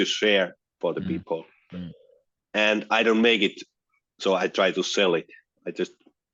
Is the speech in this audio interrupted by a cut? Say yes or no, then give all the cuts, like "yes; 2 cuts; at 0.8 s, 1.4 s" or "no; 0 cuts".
no; 0 cuts